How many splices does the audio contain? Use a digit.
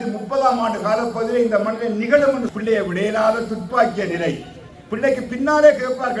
1